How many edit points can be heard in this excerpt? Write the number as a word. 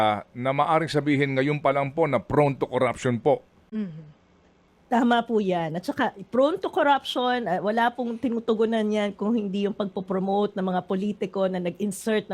zero